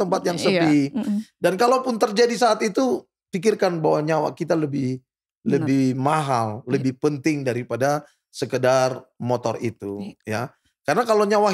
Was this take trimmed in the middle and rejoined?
no; 0 cuts

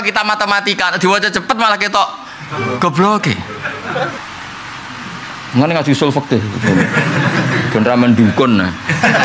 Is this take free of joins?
no; 1 cut; at 4.2 s

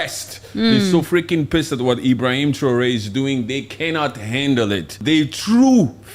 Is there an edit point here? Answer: yes; 1 cut; at 5.0 s

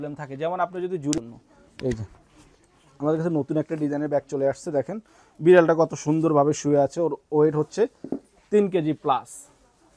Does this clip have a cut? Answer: yes; 1 cut; at 1.2 s

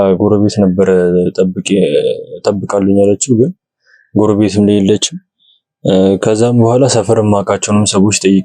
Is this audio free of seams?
yes; 0 cuts

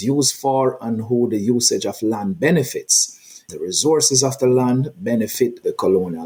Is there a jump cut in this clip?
no; 0 cuts

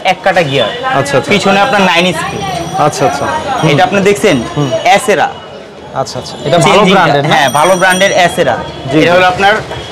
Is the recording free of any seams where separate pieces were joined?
yes; 0 cuts

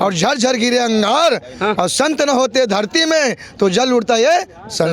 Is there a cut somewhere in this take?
no; 0 cuts

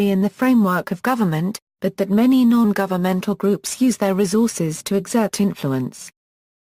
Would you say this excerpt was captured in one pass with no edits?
yes; 0 cuts

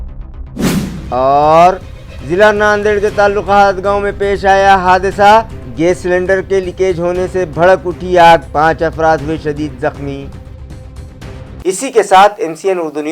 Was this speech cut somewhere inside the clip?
no; 0 cuts

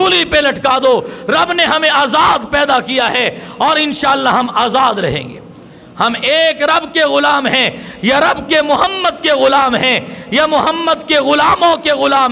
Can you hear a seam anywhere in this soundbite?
no; 0 cuts

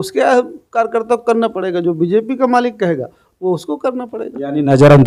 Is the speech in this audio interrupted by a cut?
no; 0 cuts

